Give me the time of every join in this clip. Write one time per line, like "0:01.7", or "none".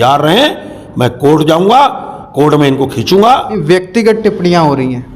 0:03.5